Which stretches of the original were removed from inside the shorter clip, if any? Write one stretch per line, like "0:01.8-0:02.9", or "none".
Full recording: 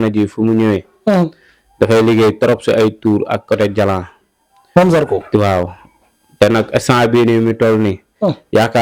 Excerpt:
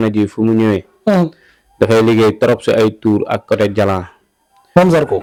none